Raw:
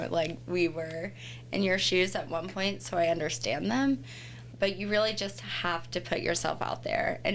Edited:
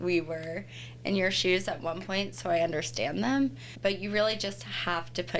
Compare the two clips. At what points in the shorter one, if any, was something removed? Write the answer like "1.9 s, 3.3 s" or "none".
3.7 s